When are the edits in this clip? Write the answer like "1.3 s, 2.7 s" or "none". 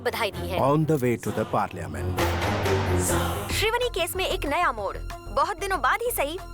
3.5 s